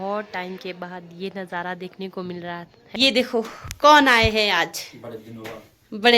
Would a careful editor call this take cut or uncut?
cut